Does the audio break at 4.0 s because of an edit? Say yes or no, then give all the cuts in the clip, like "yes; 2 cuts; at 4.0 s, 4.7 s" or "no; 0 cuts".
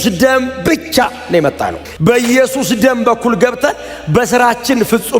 no; 1 cut; at 1.8 s